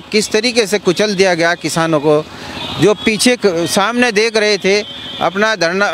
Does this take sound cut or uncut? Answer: uncut